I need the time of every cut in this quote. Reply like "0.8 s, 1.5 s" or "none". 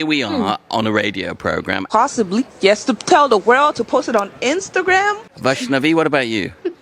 1.9 s, 5.3 s